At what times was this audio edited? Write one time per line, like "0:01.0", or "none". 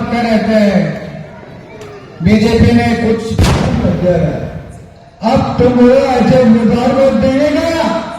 0:03.8